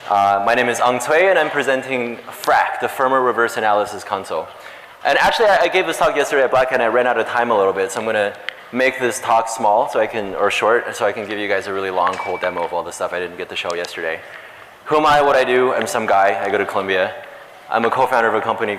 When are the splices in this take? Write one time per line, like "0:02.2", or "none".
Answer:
0:11.7